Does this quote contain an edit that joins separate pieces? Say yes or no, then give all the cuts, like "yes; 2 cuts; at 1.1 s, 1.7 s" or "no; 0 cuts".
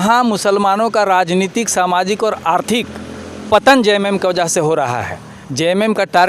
no; 0 cuts